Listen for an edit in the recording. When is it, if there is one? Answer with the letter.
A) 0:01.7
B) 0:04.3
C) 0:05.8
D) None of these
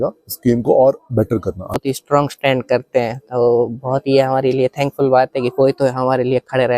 A